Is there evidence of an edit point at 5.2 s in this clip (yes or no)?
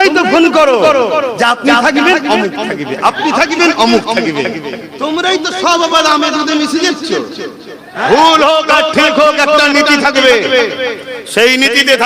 no